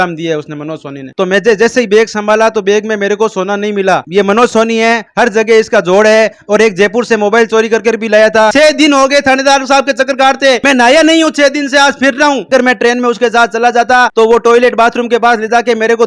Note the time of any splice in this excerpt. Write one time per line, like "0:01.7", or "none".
0:01.0
0:04.0
0:08.5
0:12.5